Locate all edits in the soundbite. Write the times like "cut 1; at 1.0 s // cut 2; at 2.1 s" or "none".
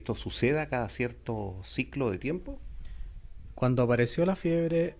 cut 1; at 2.3 s